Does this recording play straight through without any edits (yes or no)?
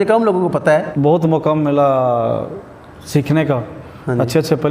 no